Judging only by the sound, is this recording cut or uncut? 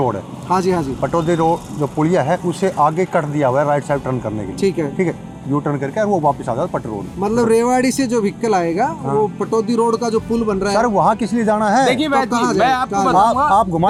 uncut